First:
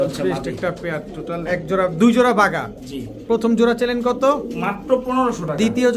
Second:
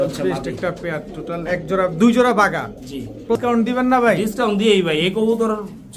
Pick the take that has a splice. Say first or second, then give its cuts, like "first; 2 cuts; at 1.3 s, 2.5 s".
second; 1 cut; at 3.4 s